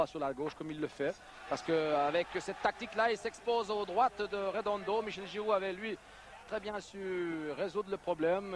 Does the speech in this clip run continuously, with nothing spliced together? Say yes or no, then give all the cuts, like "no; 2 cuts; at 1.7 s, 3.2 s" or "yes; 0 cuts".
no; 1 cut; at 6.4 s